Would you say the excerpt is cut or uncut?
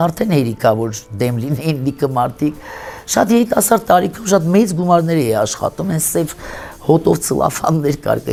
uncut